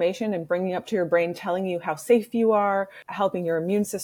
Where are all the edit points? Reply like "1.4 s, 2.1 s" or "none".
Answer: 3.0 s